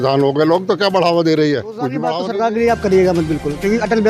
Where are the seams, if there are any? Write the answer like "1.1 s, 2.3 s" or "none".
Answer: 2.1 s